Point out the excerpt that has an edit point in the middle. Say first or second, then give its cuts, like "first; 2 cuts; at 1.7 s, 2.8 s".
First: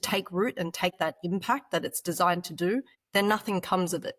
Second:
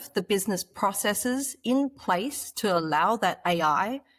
first; 2 cuts; at 0.9 s, 3.0 s